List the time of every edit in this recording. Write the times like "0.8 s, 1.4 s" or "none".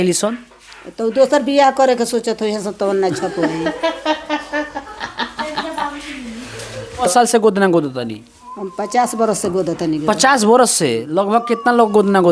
7.1 s